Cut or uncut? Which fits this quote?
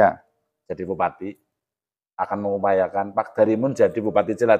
uncut